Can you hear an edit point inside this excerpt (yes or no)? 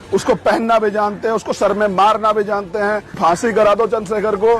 yes